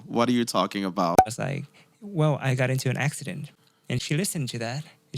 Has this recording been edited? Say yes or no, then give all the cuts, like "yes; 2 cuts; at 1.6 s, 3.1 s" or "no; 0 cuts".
yes; 2 cuts; at 1.2 s, 4.0 s